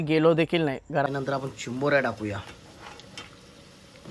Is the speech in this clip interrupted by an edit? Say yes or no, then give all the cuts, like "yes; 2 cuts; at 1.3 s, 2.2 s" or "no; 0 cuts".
yes; 1 cut; at 1.1 s